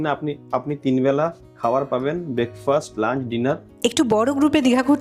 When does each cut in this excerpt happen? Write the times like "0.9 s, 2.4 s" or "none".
3.7 s